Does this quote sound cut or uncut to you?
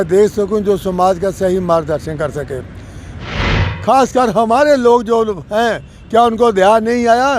cut